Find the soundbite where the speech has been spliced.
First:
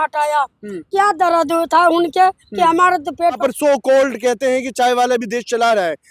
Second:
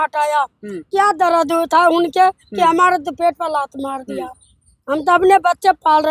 first; 1 cut; at 3.4 s

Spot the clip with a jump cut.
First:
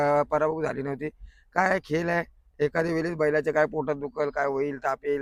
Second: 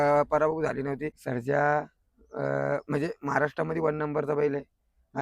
second; 1 cut; at 1.1 s

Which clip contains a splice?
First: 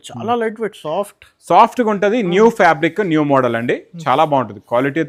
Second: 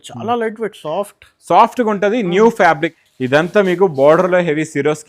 second; 1 cut; at 2.9 s

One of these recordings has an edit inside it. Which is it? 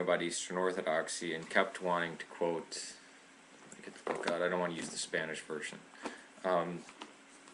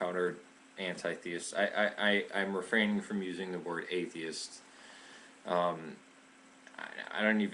second; 1 cut; at 1.6 s

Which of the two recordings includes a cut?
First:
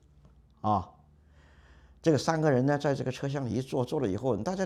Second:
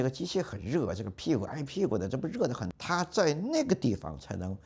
second; 1 cut; at 2.7 s

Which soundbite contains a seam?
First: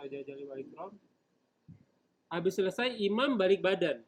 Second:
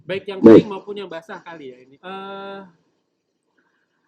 second; 1 cut; at 1.9 s

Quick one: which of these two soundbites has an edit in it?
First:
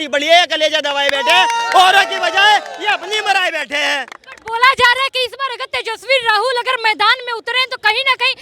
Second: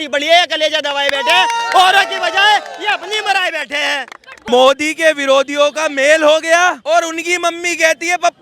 second; 2 cuts; at 4.3 s, 6.8 s

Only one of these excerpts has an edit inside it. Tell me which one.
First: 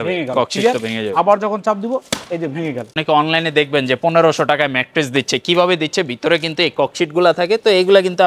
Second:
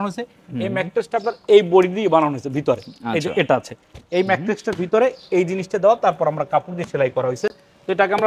first; 1 cut; at 3.0 s

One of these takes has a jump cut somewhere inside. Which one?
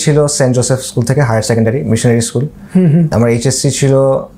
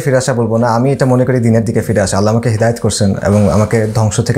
first; 1 cut; at 3.1 s

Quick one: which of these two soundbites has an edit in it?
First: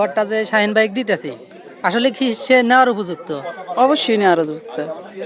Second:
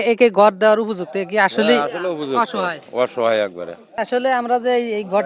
second; 1 cut; at 4.0 s

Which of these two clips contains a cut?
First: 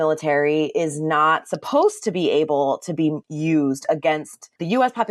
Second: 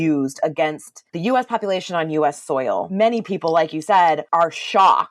second; 2 cuts; at 2.9 s, 4.2 s

